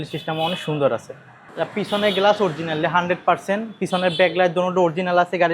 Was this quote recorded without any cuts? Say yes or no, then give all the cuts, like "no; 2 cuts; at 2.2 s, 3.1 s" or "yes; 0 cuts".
yes; 0 cuts